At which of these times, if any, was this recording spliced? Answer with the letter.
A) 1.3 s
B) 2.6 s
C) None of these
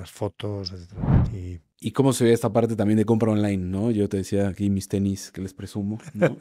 A